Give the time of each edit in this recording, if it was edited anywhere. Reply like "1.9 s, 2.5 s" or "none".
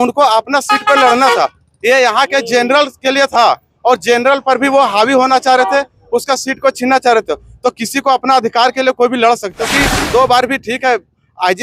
9.6 s